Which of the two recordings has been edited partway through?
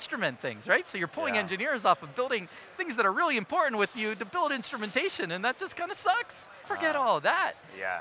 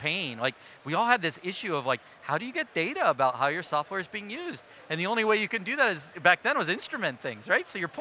first; 1 cut; at 6.6 s

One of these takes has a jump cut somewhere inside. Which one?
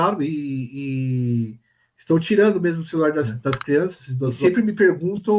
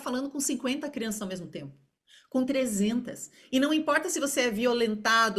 first; 1 cut; at 4.4 s

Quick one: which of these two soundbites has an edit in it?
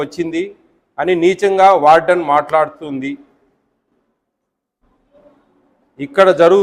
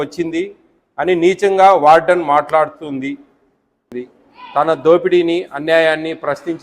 second; 1 cut; at 3.9 s

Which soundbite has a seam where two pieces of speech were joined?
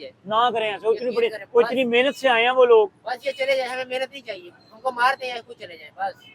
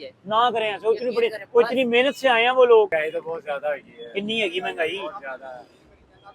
second; 1 cut; at 2.9 s

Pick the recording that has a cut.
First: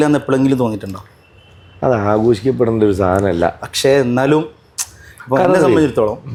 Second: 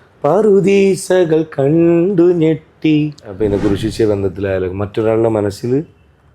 second; 1 cut; at 3.3 s

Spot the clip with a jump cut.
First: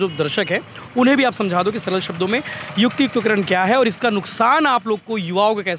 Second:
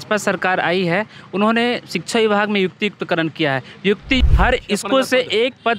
second; 1 cut; at 4.2 s

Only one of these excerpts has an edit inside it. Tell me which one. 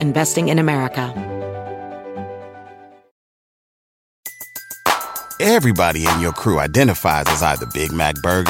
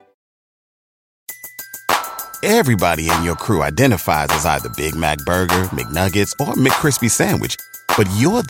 first; 1 cut; at 1.1 s

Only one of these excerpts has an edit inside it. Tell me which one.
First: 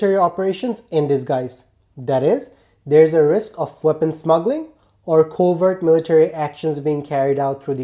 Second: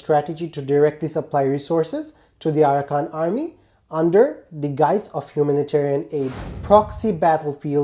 second; 1 cut; at 6.5 s

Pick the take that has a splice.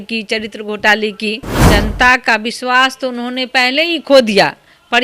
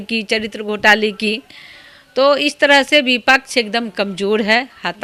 first; 1 cut; at 1.5 s

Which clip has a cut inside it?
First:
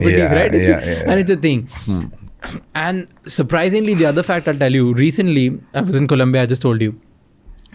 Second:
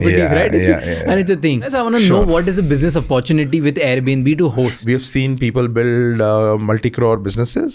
second; 2 cuts; at 1.7 s, 4.8 s

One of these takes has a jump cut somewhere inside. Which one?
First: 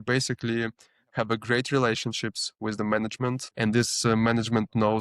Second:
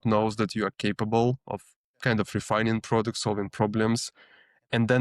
first; 1 cut; at 3.5 s

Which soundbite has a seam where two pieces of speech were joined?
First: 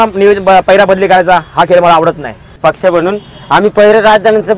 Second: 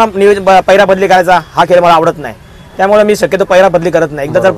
first; 1 cut; at 2.6 s

